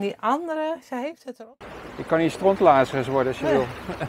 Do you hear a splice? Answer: yes; 1 cut; at 1.3 s

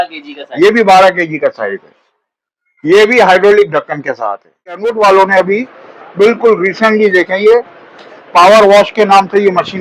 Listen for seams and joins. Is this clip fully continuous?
no; 1 cut; at 4.9 s

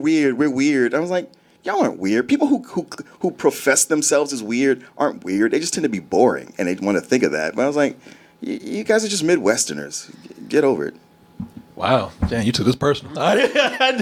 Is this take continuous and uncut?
yes; 0 cuts

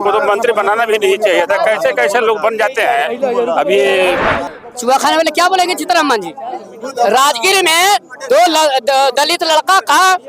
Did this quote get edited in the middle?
yes; 1 cut; at 4.4 s

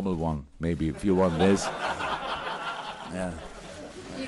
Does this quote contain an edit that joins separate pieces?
yes; 1 cut; at 1.8 s

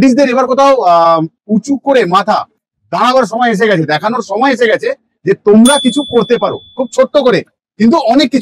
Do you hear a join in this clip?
no; 0 cuts

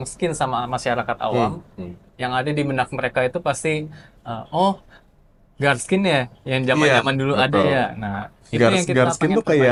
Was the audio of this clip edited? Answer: no; 0 cuts

